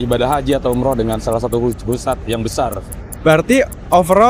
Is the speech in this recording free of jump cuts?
no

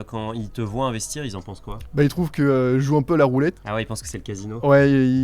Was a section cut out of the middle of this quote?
no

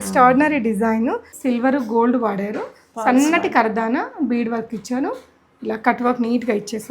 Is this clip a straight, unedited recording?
no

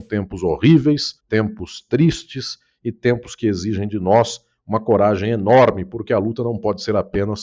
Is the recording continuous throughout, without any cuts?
no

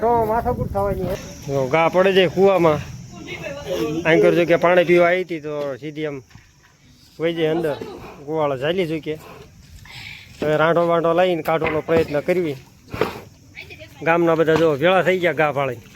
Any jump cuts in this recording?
yes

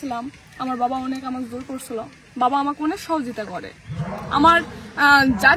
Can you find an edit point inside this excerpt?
no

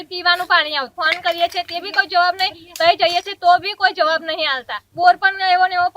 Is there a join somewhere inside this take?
yes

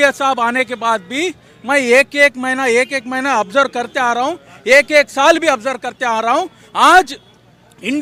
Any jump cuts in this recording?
no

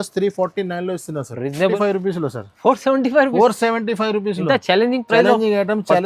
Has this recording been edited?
yes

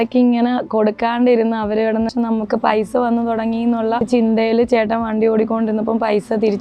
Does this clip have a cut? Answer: yes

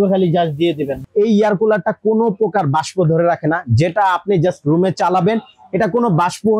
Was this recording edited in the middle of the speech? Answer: yes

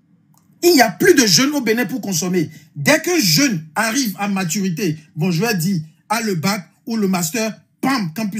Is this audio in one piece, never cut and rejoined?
yes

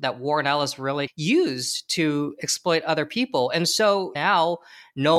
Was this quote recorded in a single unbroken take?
no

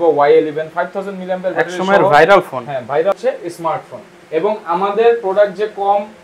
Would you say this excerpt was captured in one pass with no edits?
no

